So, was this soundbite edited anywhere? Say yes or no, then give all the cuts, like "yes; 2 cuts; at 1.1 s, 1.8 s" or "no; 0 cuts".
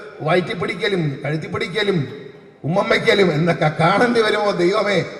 no; 0 cuts